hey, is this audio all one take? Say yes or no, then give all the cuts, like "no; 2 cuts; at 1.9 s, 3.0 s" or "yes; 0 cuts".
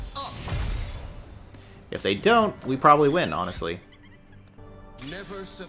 yes; 0 cuts